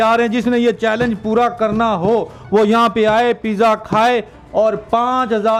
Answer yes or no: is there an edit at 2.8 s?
no